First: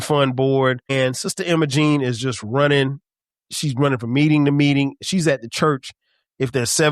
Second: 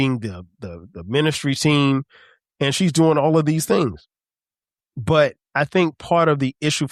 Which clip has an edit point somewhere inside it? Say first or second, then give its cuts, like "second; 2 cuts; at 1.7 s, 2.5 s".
first; 1 cut; at 0.9 s